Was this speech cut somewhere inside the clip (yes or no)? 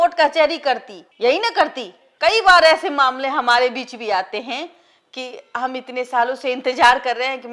no